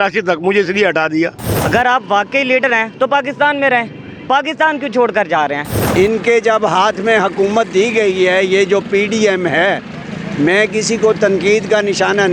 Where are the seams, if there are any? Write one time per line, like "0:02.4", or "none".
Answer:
0:01.5
0:05.8

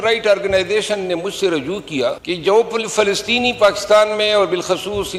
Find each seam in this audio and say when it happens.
0:02.2

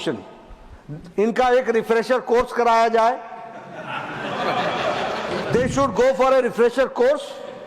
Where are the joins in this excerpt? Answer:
0:05.4

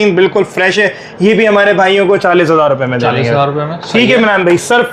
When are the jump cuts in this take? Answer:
none

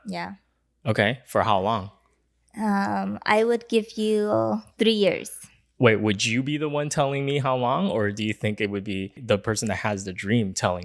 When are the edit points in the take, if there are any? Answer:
0:09.2

